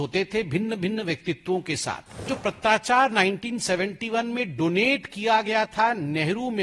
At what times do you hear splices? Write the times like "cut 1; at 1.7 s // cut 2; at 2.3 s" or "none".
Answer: cut 1; at 2.3 s